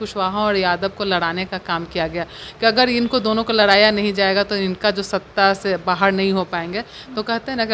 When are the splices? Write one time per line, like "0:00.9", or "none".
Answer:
none